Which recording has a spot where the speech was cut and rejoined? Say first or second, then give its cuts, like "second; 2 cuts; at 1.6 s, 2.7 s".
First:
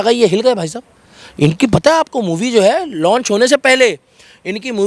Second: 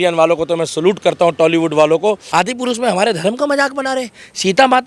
second; 1 cut; at 2.2 s